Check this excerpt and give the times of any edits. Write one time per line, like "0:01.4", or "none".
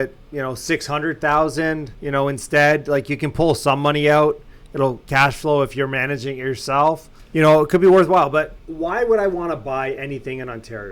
0:01.9